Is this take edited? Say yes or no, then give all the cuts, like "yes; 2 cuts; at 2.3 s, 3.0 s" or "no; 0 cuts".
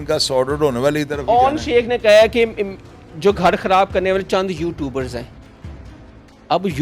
no; 0 cuts